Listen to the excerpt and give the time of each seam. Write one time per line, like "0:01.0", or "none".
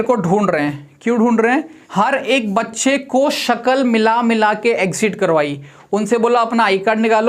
0:01.8

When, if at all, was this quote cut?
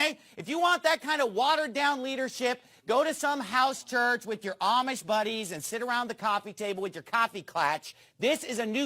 0:07.2

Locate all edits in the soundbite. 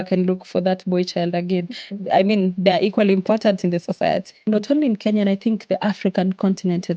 0:04.4

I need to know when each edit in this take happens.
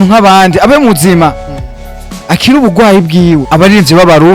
0:03.4

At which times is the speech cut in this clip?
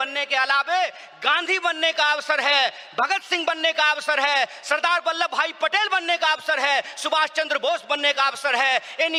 none

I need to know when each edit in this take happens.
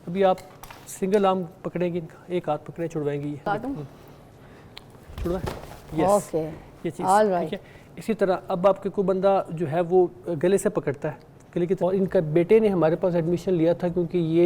0:03.4
0:11.8

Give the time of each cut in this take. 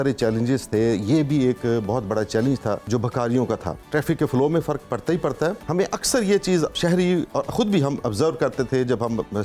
0:02.8
0:03.8
0:05.6
0:06.8

